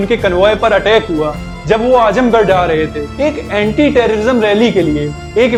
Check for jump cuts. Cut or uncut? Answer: uncut